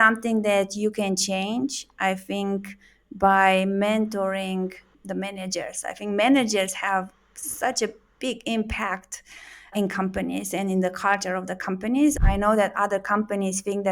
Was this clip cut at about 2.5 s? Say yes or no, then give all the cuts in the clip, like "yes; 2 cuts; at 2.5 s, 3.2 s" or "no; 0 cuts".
no; 3 cuts; at 4.9 s, 9.7 s, 12.1 s